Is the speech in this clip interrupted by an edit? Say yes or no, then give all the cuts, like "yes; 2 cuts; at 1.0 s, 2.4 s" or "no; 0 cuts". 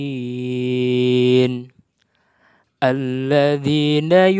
no; 0 cuts